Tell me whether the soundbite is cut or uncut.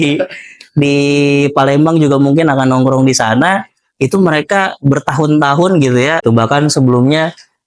cut